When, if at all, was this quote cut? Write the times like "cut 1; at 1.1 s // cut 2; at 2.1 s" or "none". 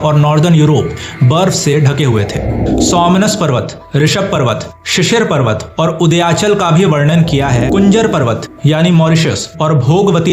cut 1; at 2.7 s // cut 2; at 7.6 s